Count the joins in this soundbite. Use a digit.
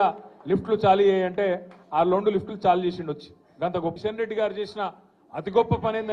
1